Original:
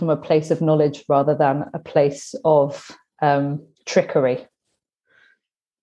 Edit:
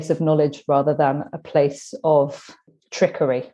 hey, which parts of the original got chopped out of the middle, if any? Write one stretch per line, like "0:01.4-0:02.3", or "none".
0:03.1-0:03.6

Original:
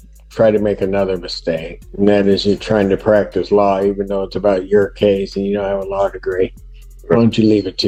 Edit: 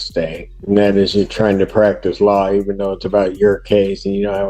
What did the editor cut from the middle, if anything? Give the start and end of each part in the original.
none

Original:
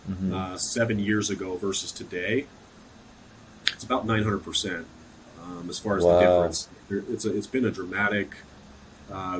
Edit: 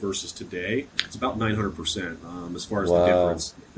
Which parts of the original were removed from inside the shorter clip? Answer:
0:02.6-0:03.7
0:04.9-0:05.4

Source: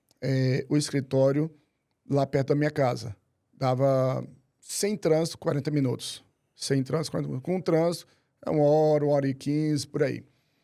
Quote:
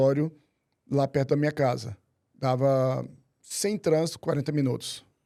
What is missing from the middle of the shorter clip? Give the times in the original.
none

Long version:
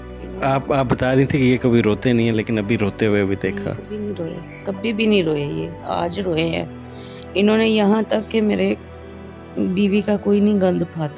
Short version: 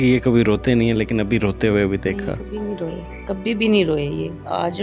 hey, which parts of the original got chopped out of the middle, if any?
none

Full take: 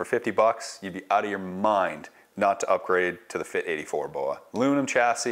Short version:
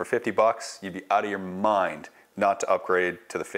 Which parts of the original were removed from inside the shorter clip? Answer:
none

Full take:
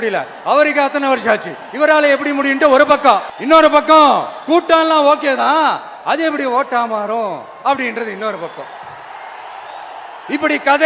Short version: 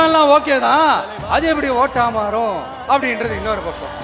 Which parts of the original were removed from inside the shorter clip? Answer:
none

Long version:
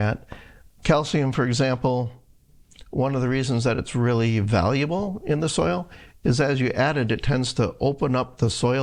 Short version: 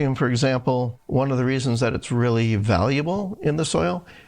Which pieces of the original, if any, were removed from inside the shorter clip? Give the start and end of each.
0:02.1-0:02.8

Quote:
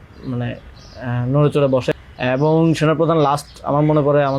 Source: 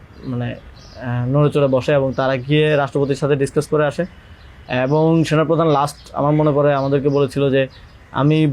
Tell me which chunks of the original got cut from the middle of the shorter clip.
0:01.9-0:04.4

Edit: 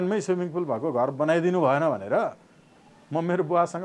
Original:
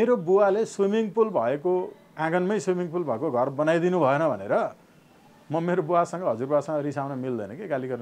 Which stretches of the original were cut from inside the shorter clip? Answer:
none

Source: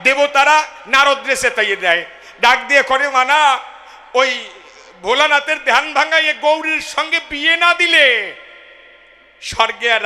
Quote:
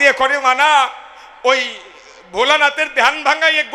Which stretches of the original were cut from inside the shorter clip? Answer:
none

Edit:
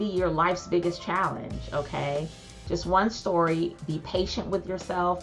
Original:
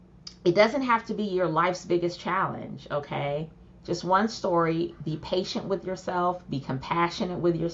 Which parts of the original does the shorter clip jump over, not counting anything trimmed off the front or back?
none

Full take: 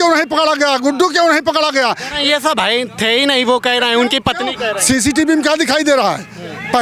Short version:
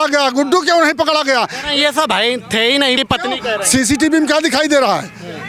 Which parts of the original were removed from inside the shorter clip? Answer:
0:03.4-0:04.1

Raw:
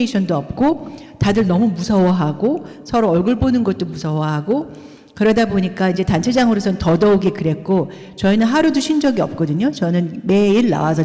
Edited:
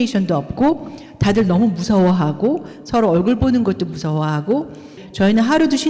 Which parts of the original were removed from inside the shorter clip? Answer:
0:05.0-0:08.0

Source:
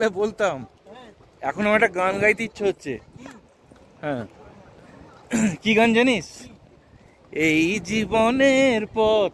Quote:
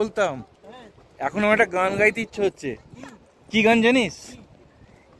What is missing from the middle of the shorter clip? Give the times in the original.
0:03.7-0:05.6

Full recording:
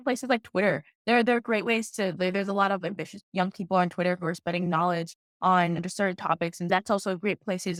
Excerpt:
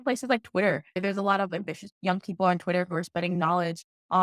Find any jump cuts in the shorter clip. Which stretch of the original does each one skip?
0:01.0-0:02.3

